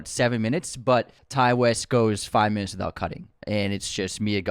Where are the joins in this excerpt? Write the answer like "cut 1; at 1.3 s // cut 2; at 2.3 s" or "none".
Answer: cut 1; at 1.2 s // cut 2; at 3.3 s